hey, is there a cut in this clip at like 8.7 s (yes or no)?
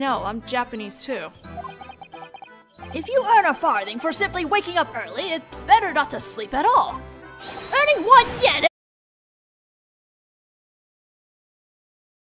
no